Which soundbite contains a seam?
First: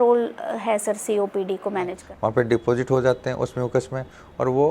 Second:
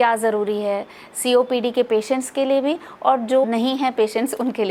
first; 1 cut; at 2.0 s

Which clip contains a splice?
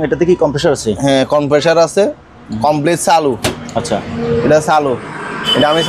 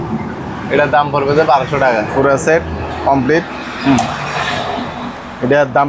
second; 1 cut; at 2.1 s

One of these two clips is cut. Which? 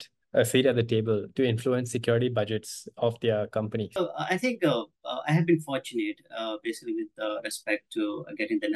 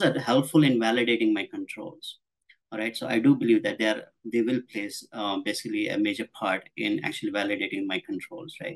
first; 1 cut; at 3.9 s

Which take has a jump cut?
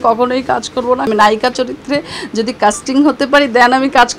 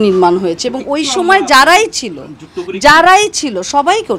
first; 1 cut; at 1.1 s

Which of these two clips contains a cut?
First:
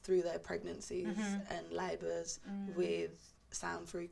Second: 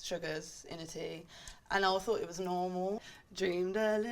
second; 1 cut; at 3.1 s

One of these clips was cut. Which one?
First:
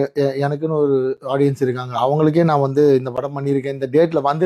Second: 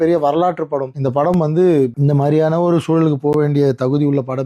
second; 2 cuts; at 0.9 s, 2.0 s

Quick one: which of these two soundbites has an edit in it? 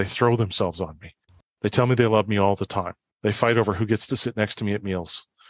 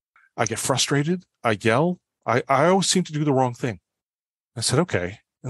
second; 1 cut; at 1.3 s

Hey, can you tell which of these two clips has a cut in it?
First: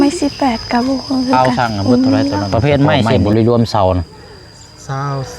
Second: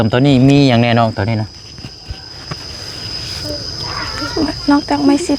first; 1 cut; at 3.1 s

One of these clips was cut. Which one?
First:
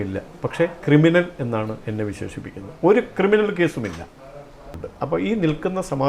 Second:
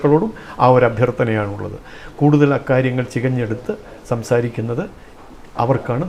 first; 1 cut; at 4.8 s

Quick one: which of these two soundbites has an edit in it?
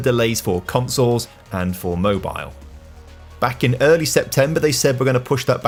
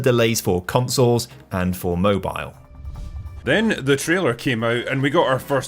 second; 1 cut; at 3.2 s

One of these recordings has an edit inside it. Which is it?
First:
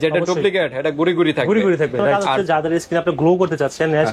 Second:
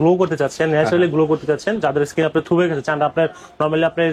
first; 1 cut; at 2.2 s

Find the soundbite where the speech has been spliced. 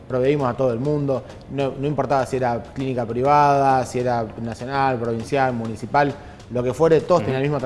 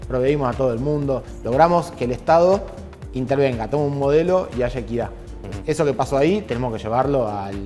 second; 1 cut; at 1.3 s

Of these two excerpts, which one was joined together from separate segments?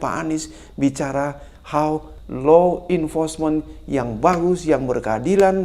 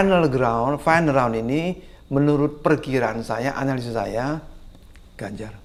first; 1 cut; at 2.1 s

